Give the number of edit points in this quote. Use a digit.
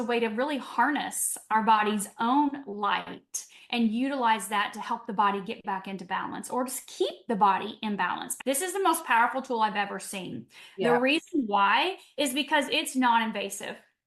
1